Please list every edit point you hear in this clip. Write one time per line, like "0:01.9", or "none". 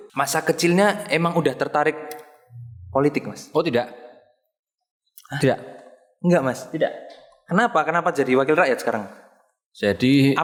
none